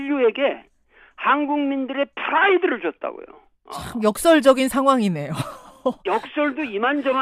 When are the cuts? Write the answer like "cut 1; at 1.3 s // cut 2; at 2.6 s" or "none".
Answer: cut 1; at 5.5 s